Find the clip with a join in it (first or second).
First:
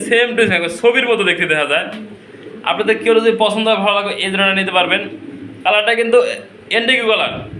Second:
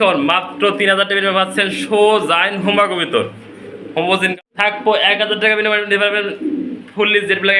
second